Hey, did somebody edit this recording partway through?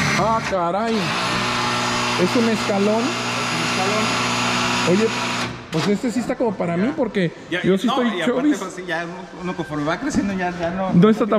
no; 0 cuts

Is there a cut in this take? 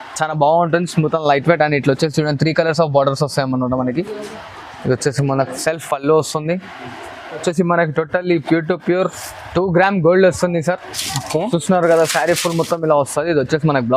yes; 1 cut; at 7.4 s

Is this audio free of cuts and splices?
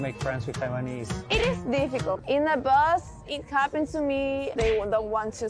no; 3 cuts; at 1.1 s, 2.2 s, 4.5 s

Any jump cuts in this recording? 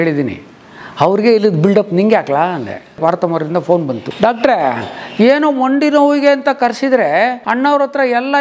yes; 3 cuts; at 3.0 s, 4.1 s, 7.4 s

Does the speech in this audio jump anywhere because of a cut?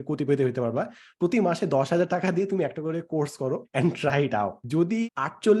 yes; 2 cuts; at 3.7 s, 4.8 s

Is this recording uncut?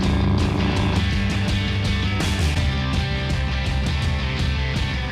yes; 0 cuts

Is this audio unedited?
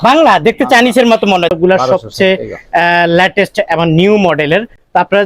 no; 1 cut; at 1.5 s

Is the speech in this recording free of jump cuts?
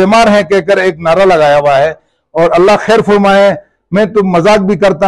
yes; 0 cuts

